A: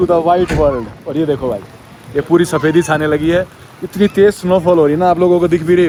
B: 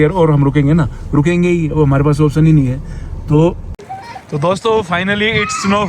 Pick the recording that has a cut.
B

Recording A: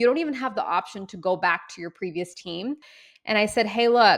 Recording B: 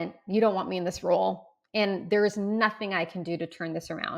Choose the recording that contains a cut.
A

